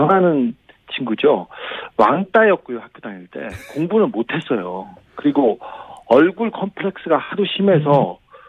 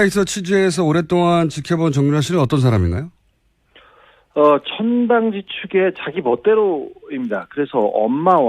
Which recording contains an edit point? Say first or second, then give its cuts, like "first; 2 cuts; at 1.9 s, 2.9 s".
second; 1 cut; at 5.4 s